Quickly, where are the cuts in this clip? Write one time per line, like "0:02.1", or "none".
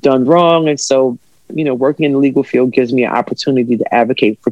none